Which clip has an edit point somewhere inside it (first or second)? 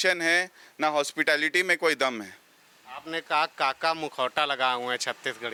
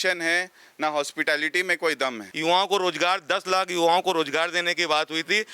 second